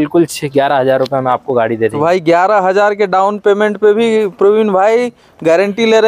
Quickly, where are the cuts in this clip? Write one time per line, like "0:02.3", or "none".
none